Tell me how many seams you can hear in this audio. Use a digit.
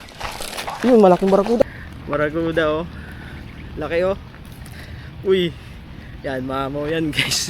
1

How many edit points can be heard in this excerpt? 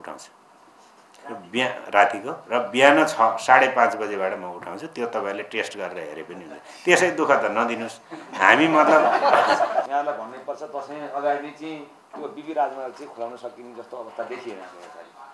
1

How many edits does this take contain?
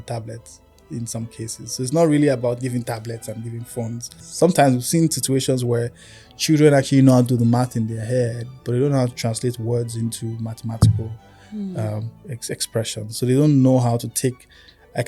1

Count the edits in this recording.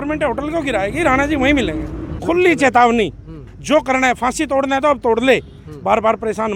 1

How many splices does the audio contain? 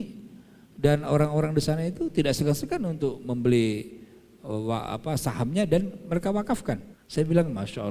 1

